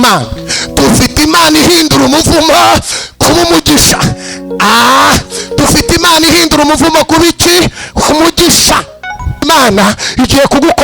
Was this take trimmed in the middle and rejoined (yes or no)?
yes